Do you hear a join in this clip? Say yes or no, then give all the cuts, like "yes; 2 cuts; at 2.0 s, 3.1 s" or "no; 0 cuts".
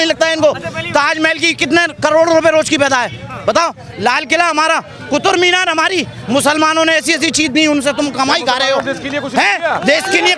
no; 0 cuts